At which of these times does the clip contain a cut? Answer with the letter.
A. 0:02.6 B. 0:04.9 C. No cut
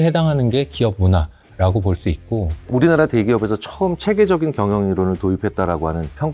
A